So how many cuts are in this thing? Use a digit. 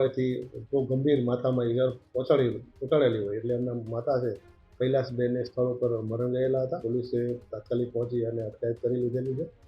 1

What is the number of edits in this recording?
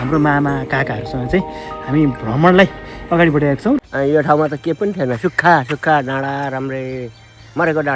1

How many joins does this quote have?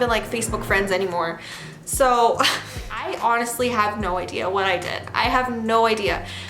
1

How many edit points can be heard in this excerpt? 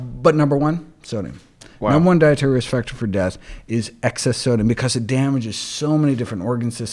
0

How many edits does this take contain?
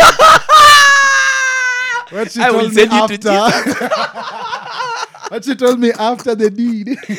0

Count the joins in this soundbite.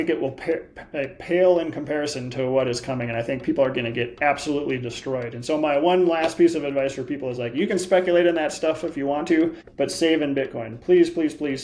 1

